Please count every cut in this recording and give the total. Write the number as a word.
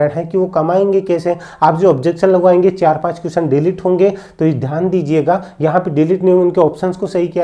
zero